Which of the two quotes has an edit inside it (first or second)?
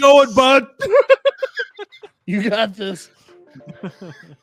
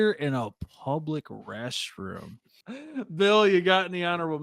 second